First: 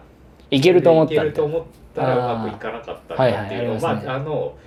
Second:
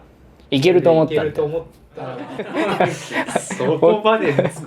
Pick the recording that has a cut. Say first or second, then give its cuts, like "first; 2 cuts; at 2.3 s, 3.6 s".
second; 1 cut; at 1.9 s